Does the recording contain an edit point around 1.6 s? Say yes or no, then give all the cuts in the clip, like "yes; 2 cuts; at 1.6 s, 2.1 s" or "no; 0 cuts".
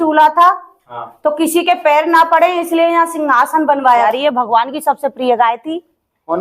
no; 1 cut; at 4.1 s